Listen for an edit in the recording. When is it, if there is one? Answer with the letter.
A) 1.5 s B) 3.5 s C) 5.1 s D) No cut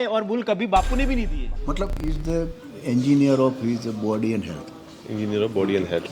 A